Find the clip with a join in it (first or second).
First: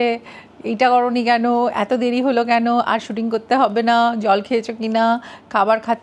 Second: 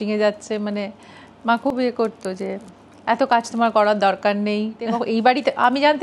second